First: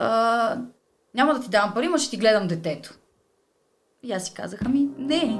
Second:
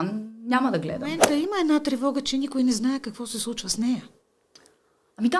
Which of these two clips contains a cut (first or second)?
second